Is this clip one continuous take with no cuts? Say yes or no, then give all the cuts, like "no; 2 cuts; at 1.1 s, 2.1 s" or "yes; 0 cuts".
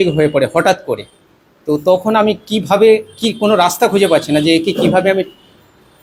yes; 0 cuts